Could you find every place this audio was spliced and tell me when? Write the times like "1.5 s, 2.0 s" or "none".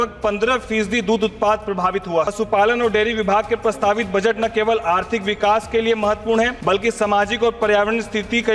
2.3 s, 6.6 s